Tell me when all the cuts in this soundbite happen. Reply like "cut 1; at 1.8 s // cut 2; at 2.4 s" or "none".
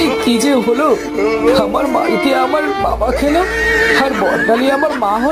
none